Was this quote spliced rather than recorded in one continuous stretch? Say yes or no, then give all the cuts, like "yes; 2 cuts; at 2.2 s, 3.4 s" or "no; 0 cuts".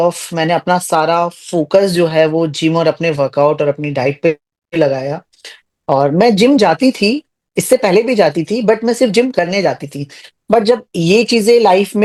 no; 0 cuts